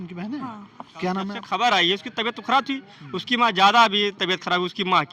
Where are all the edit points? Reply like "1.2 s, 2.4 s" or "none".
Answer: 1.4 s